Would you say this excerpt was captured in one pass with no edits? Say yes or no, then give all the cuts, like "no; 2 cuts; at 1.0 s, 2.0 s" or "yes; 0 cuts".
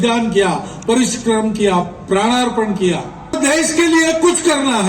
no; 1 cut; at 3.4 s